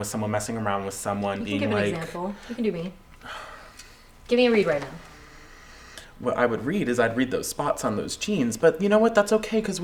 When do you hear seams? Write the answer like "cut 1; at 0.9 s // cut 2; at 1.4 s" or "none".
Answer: none

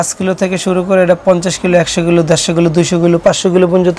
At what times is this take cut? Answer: none

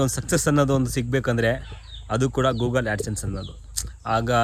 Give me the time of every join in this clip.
none

